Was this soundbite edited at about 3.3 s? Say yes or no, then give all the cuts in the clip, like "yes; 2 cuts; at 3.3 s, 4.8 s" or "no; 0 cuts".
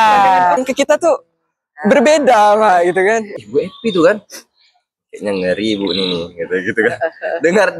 yes; 1 cut; at 3.3 s